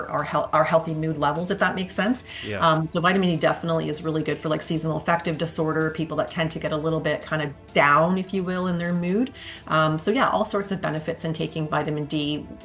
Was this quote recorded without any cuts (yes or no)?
yes